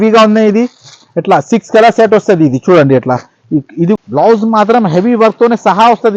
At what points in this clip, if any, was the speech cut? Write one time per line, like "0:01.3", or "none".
0:04.0